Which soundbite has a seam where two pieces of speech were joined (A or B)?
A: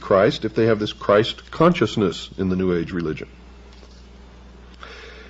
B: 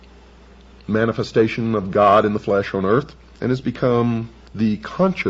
A